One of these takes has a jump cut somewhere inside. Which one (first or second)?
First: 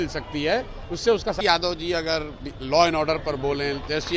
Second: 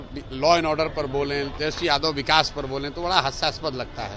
first